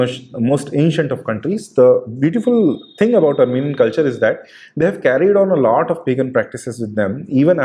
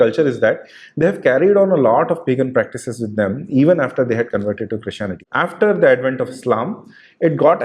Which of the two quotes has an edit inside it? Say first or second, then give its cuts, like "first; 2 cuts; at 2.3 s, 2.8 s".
second; 1 cut; at 5.2 s